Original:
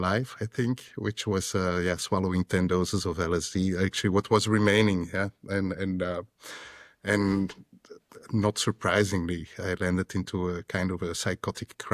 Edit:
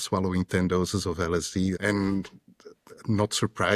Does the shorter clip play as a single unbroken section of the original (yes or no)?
no